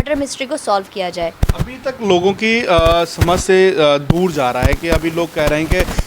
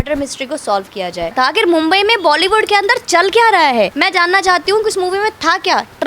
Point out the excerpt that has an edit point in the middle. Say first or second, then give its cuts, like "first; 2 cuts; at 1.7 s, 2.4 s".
second; 2 cuts; at 1.3 s, 3.9 s